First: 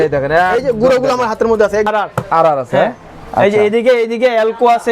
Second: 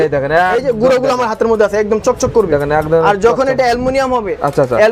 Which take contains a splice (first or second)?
first